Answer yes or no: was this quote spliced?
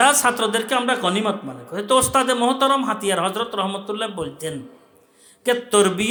no